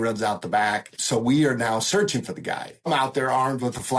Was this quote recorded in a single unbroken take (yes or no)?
no